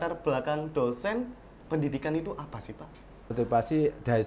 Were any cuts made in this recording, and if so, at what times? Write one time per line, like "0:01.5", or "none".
0:03.3